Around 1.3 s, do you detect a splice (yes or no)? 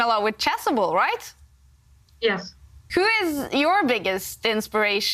no